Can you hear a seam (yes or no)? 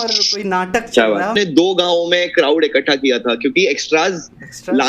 yes